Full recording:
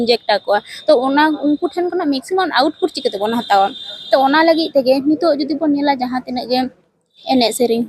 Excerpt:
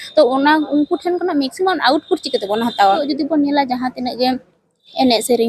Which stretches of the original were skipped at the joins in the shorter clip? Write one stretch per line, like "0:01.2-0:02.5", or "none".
0:03.8-0:05.4